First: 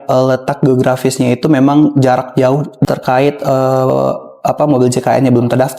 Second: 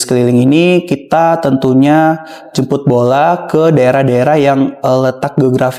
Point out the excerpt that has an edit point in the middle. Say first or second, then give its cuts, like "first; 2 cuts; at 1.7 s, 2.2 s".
first; 1 cut; at 2.7 s